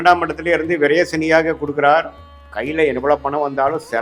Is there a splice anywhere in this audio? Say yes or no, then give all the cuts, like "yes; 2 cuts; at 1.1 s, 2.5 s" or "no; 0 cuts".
no; 0 cuts